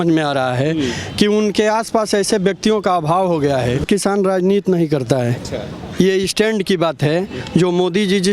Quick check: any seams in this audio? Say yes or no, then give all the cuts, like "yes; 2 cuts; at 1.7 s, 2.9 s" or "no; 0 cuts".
yes; 1 cut; at 3.8 s